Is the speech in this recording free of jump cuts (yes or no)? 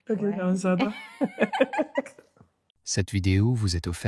no